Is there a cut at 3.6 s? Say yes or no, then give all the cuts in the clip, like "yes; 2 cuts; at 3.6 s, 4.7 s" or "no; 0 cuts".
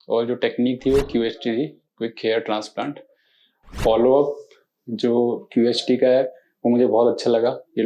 yes; 1 cut; at 3.6 s